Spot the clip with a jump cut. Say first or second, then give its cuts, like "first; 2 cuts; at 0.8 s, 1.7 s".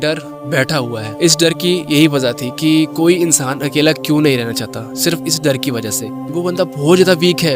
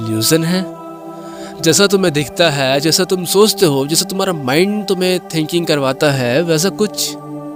first; 2 cuts; at 1.0 s, 6.3 s